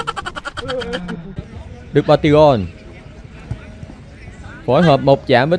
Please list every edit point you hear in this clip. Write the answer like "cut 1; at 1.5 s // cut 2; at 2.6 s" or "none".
cut 1; at 1.4 s